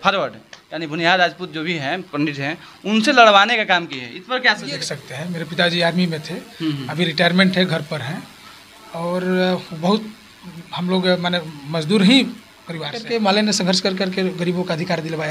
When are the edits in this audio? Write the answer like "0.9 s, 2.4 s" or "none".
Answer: 4.7 s, 13.0 s